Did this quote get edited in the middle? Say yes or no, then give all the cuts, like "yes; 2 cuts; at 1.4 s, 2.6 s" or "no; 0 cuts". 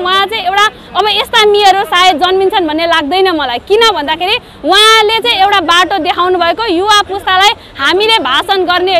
no; 0 cuts